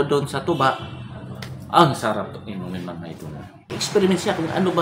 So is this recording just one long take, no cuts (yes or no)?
no